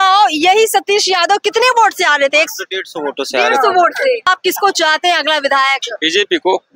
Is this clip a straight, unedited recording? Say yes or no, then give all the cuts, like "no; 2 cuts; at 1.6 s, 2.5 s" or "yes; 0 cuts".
no; 1 cut; at 4.3 s